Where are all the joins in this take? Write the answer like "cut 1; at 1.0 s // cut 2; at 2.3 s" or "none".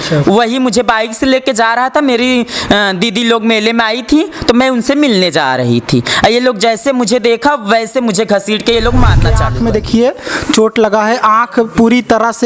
cut 1; at 9.4 s